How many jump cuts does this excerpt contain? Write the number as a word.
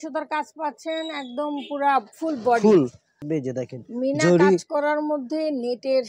one